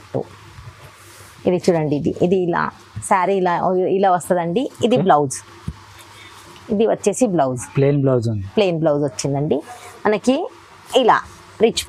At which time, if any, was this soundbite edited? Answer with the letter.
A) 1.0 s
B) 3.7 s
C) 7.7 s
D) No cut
D